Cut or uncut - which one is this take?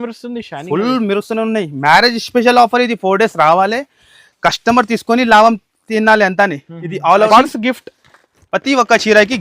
cut